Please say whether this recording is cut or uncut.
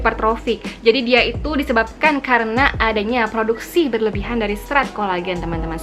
uncut